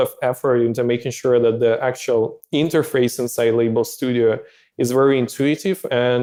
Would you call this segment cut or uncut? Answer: uncut